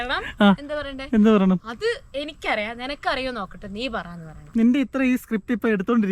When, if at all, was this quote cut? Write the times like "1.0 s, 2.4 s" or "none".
4.3 s